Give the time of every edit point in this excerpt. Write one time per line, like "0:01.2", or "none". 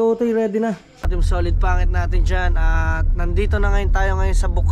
0:01.1